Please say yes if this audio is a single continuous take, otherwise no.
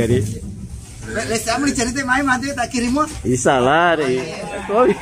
no